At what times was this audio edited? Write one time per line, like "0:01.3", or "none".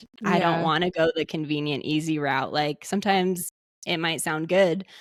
none